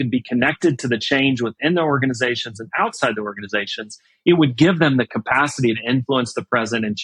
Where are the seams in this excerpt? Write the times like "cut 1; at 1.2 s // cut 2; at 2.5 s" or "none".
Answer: none